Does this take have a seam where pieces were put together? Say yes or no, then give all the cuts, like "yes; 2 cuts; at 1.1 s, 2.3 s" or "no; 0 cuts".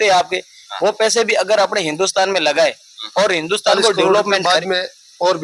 yes; 1 cut; at 4.4 s